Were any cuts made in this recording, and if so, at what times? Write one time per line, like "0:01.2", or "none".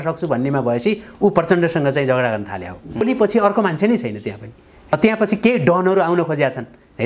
0:03.0